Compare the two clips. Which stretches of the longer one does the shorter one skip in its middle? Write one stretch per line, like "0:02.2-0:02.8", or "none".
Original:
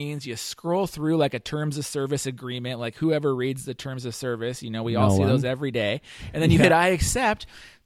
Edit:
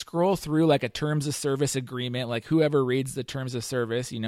none

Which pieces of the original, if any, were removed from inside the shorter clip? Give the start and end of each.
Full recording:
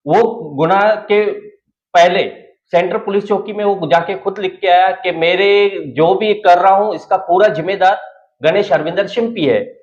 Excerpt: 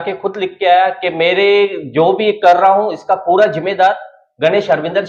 none

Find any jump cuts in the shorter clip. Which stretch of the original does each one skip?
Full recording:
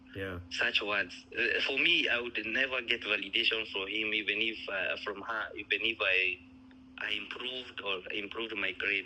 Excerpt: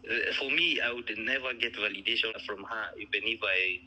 0:03.7-0:05.0

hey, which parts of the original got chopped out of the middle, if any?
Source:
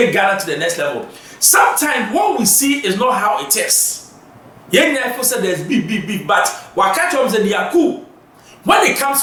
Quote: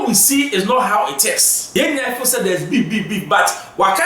0:03.8-0:04.5

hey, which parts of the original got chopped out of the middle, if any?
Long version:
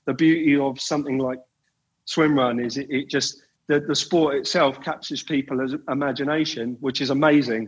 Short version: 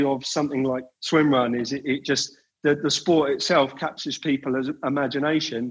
0:01.5-0:02.0

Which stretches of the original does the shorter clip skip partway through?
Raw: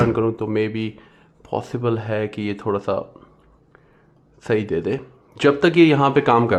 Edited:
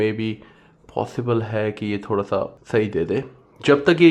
0:03.1-0:04.3

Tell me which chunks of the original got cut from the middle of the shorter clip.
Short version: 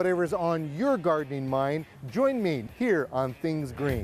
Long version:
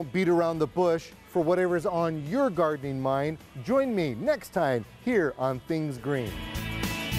0:04.2-0:04.9

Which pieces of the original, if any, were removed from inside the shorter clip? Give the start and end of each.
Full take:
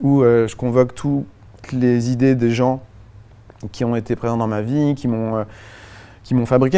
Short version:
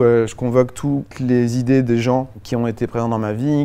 0:01.3-0:01.6
0:02.9-0:03.7

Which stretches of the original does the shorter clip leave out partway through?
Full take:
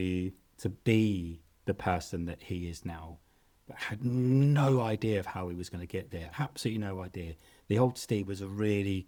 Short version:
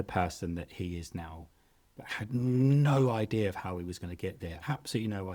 none

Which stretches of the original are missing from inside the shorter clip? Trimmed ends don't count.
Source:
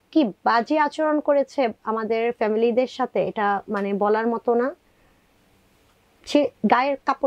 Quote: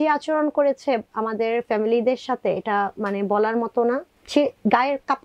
0:04.9-0:06.1

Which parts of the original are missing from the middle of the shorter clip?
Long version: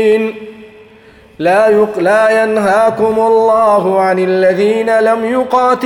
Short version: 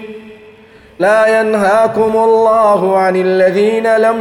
0:01.3-0:02.0

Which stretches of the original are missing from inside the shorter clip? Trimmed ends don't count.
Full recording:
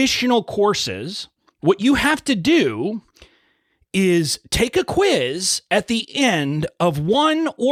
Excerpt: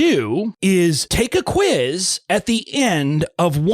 0:03.5-0:04.4

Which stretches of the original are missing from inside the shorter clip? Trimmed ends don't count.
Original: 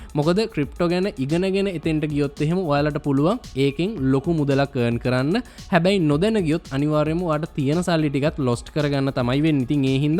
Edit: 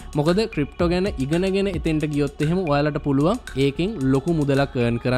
none

